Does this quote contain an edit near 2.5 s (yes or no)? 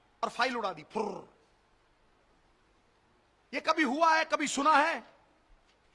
no